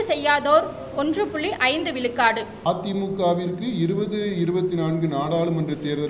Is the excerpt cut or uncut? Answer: cut